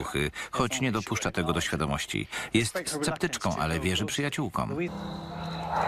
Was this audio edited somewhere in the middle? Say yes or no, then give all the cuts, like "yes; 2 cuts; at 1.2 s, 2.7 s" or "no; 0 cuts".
no; 0 cuts